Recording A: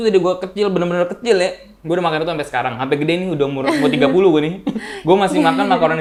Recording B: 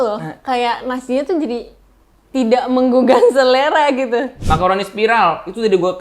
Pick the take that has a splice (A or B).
B